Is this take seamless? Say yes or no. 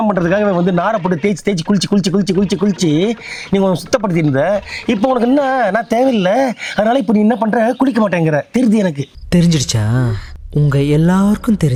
yes